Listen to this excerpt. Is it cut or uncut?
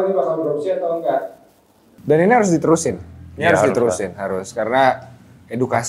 cut